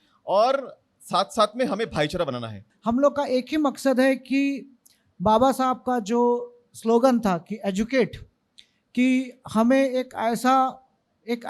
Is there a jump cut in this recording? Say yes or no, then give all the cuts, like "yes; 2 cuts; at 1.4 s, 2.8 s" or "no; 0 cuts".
yes; 1 cut; at 2.6 s